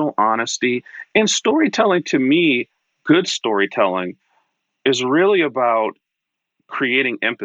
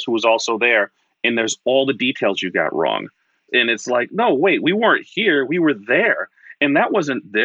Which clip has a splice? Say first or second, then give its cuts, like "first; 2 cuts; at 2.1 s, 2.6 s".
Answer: second; 1 cut; at 3.4 s